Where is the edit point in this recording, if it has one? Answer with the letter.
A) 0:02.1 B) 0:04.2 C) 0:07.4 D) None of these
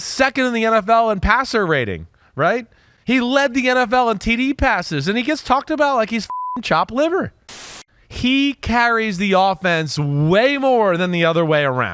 C